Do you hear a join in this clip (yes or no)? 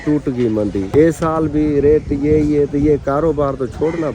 no